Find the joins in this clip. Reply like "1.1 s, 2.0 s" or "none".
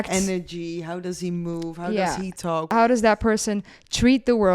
2.7 s